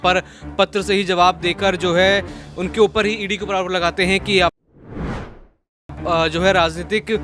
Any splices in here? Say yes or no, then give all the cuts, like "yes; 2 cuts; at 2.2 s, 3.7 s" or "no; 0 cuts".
no; 0 cuts